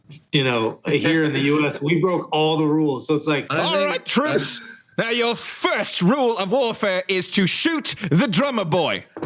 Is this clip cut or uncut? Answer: cut